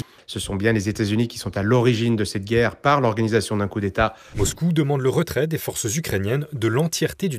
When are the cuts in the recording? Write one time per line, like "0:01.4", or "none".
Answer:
0:04.2